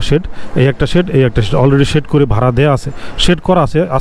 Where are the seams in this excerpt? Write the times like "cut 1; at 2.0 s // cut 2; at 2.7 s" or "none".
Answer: none